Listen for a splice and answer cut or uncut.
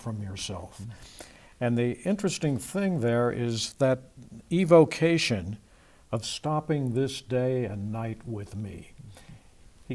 cut